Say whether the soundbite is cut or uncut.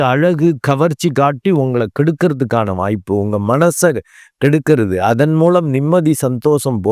uncut